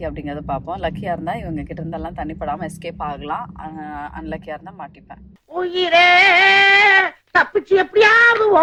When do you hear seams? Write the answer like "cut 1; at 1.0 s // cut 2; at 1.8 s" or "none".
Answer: none